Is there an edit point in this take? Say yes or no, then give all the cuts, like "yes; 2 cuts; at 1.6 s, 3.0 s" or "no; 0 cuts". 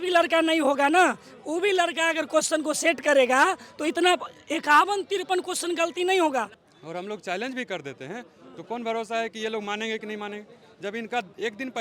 yes; 1 cut; at 6.6 s